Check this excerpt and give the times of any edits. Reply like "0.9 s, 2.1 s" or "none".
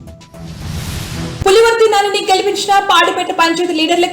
1.4 s